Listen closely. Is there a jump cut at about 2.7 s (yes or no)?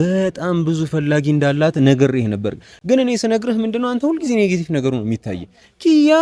no